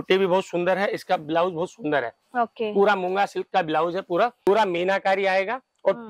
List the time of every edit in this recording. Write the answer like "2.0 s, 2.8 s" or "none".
4.5 s